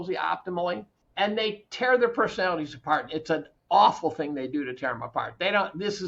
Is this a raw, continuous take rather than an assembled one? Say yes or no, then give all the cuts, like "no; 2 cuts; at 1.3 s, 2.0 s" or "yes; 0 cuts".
no; 1 cut; at 1.0 s